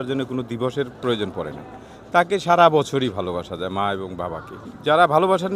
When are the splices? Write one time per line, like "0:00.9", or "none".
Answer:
none